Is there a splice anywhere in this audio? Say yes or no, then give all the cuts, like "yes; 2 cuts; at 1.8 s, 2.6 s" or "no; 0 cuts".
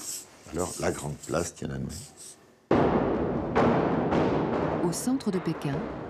yes; 1 cut; at 3.5 s